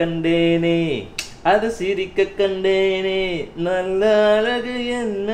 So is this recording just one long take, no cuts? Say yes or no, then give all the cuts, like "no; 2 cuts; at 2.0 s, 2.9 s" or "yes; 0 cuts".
yes; 0 cuts